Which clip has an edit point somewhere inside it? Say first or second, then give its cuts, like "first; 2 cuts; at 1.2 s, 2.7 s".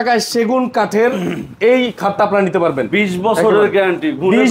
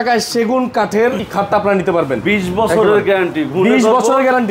second; 1 cut; at 1.2 s